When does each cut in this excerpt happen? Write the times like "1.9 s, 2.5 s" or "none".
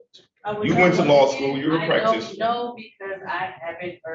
none